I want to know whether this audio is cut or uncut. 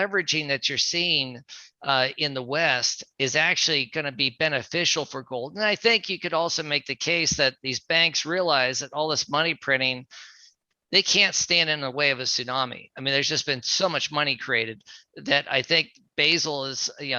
uncut